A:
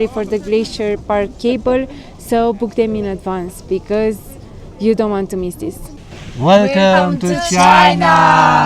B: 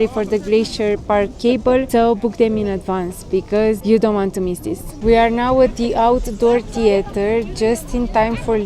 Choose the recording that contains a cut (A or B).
B